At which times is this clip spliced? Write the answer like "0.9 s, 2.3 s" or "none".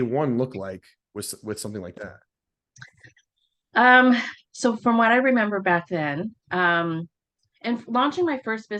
none